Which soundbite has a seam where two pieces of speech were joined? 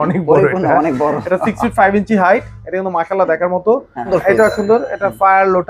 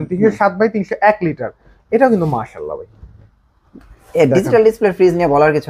first; 1 cut; at 4.0 s

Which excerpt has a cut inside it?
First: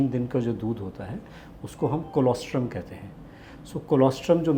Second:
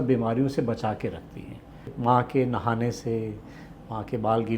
second; 1 cut; at 1.9 s

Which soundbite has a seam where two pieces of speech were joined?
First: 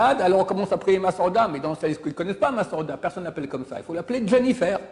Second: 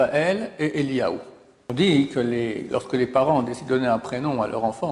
second; 1 cut; at 1.7 s

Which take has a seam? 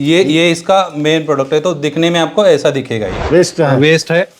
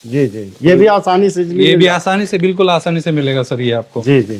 first; 1 cut; at 3.1 s

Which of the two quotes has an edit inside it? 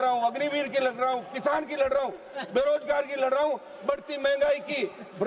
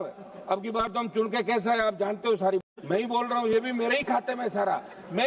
second; 1 cut; at 2.6 s

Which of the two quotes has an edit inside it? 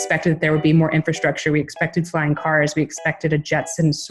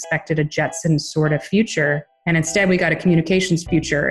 second; 1 cut; at 2.1 s

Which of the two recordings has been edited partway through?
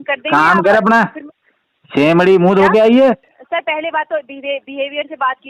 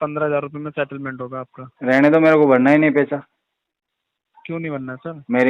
first; 1 cut; at 3.3 s

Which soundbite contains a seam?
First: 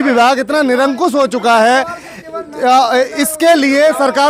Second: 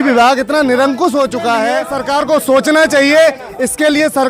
second; 1 cut; at 1.9 s

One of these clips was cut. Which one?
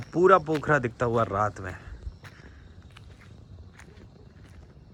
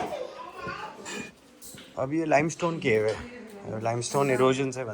second; 1 cut; at 1.4 s

